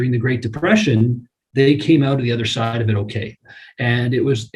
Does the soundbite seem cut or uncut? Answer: uncut